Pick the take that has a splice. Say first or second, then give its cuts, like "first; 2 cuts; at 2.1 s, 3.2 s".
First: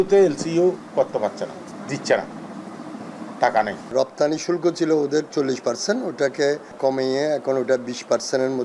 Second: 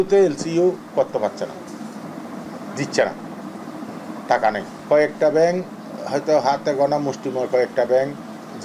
first; 3 cuts; at 1.7 s, 3.9 s, 6.7 s